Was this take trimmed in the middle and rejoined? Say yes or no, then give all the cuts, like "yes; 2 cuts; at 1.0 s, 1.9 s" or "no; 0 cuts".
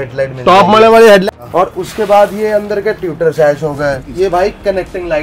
yes; 2 cuts; at 1.2 s, 4.0 s